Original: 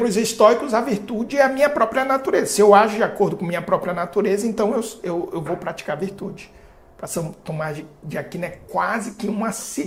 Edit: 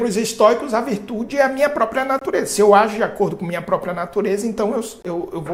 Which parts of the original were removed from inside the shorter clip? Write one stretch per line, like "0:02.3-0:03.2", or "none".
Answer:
none